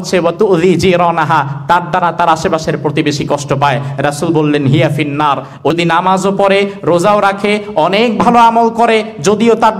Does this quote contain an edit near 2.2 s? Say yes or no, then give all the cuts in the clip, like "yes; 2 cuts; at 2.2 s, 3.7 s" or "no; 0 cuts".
no; 0 cuts